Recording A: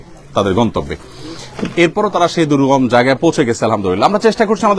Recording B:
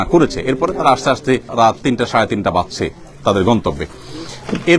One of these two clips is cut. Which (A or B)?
B